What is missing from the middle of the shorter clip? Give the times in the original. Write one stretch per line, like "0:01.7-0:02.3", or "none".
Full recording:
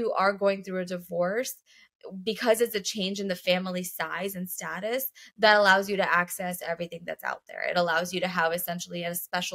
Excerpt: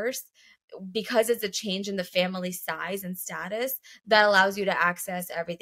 none